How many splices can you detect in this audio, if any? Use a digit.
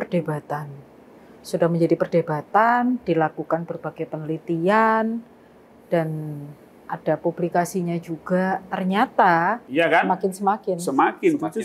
1